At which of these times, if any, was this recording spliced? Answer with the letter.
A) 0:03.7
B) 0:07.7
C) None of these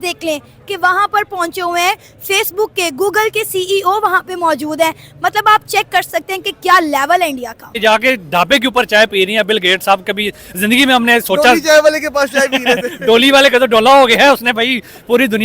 B